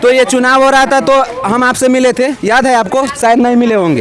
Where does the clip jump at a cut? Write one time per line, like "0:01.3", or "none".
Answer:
none